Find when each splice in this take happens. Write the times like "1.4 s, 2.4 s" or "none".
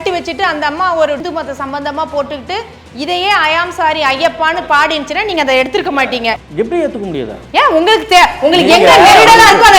1.2 s, 6.2 s